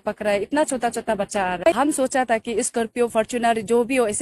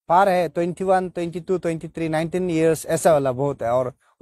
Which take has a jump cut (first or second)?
first